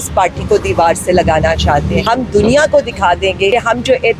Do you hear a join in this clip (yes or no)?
yes